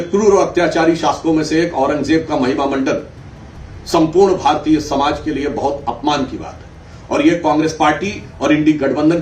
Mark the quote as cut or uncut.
uncut